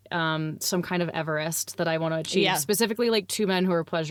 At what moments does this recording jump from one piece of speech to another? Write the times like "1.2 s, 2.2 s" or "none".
none